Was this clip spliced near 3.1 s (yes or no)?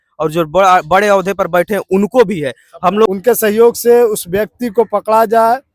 yes